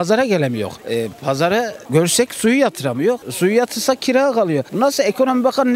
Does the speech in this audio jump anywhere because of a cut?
no; 0 cuts

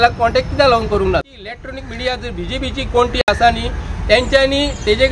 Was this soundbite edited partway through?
yes; 1 cut; at 1.2 s

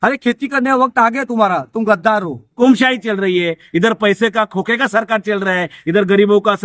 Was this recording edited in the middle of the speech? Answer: yes; 1 cut; at 2.6 s

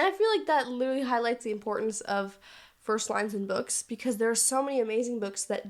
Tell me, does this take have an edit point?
no; 0 cuts

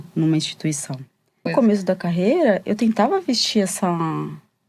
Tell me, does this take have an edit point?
yes; 1 cut; at 1.5 s

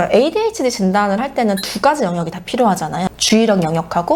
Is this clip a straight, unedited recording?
yes; 0 cuts

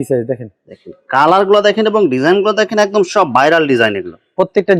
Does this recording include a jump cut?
no; 0 cuts

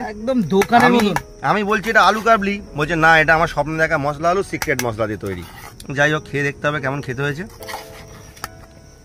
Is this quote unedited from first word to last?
yes; 0 cuts

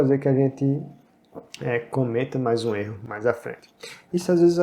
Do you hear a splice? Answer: no; 0 cuts

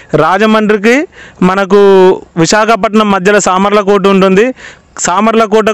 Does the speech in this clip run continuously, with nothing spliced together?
yes; 0 cuts

